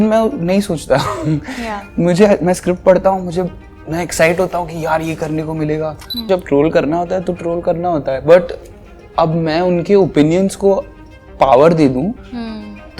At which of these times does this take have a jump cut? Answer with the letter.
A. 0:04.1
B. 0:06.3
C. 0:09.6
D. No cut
B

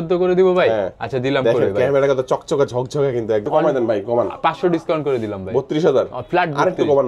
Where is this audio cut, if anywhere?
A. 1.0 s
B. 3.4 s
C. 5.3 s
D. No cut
B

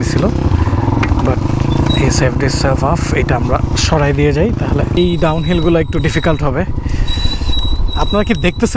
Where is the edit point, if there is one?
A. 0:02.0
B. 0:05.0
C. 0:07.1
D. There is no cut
B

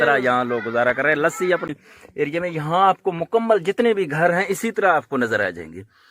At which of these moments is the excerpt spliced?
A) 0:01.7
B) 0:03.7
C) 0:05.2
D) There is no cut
A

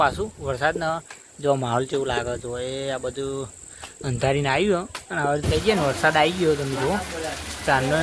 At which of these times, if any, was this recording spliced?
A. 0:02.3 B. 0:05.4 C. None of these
B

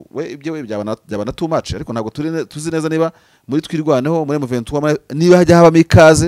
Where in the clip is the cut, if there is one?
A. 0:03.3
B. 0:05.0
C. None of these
C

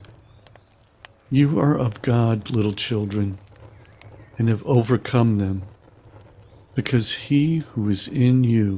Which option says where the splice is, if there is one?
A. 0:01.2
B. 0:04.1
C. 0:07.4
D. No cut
A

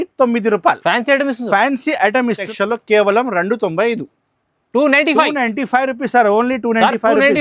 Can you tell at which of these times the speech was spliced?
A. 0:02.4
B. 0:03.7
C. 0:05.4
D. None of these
A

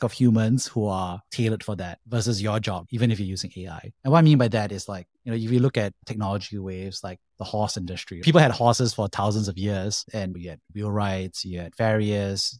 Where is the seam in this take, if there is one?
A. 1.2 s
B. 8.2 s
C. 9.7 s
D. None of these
B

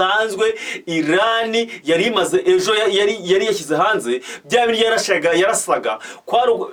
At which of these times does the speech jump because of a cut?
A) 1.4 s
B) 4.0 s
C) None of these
C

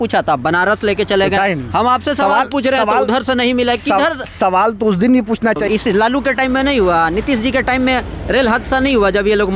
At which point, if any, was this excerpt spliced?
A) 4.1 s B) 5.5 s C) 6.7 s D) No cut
B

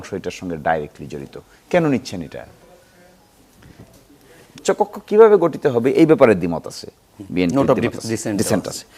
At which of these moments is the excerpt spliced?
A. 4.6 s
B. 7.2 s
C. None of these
A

